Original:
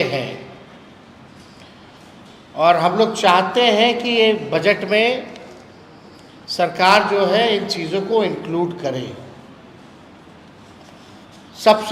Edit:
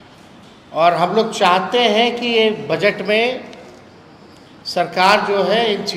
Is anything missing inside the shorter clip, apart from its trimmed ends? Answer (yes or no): no